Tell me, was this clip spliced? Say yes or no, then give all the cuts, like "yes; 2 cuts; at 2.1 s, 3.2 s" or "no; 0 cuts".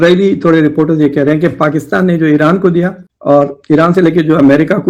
no; 0 cuts